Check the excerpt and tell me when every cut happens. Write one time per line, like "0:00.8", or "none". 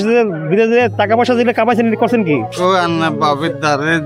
0:02.5

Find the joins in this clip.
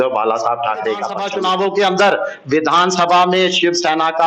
0:01.2

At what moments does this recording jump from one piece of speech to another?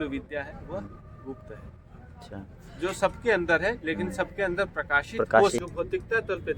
0:05.6

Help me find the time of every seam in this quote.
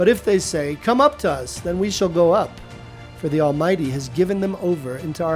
none

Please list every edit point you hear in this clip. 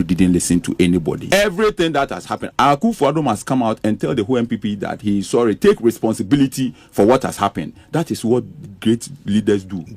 0:01.2
0:02.4

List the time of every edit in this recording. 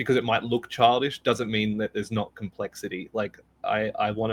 none

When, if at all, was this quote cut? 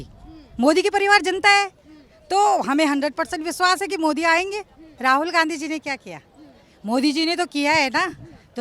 0:04.9

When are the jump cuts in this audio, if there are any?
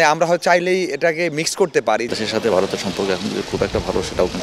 0:02.1

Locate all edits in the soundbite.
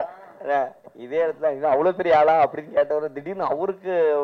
none

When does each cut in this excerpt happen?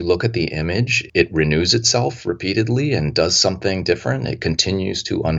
0:01.0

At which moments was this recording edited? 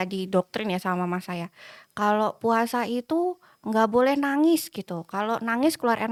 none

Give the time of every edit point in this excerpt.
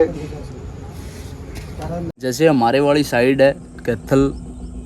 0:02.1

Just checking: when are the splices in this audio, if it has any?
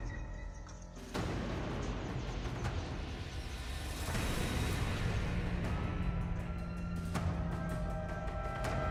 none

